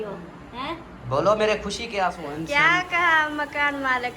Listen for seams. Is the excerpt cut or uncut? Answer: cut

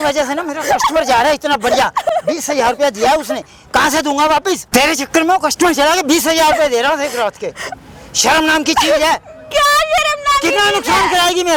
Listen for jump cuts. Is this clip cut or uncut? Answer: uncut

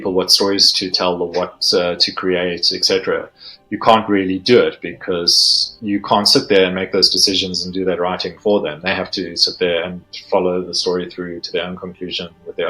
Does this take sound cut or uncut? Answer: uncut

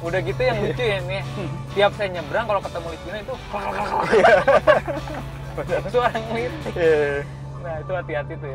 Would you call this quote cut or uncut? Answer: uncut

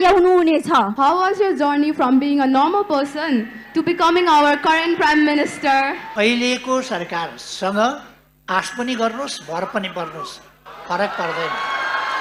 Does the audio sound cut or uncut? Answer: cut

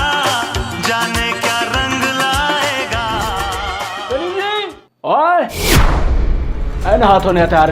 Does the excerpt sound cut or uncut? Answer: uncut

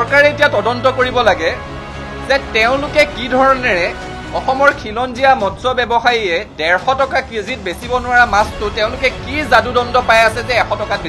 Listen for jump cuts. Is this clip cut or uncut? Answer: uncut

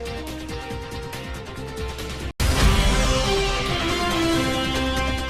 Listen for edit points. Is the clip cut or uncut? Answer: uncut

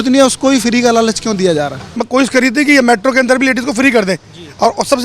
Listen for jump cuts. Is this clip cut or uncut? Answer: cut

